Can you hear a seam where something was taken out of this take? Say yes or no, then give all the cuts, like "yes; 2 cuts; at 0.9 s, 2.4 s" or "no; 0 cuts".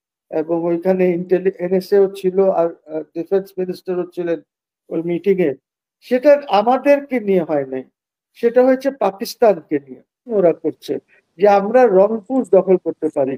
yes; 1 cut; at 10.3 s